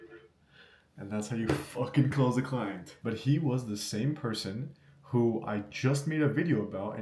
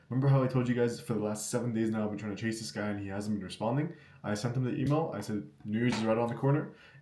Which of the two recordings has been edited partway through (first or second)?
first